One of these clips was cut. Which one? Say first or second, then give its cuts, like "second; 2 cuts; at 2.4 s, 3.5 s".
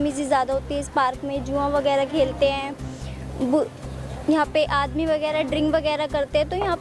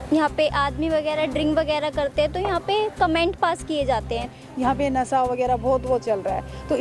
second; 1 cut; at 4.3 s